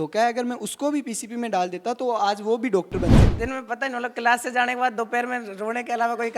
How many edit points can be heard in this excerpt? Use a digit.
1